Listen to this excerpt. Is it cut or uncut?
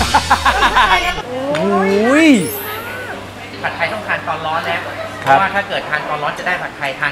cut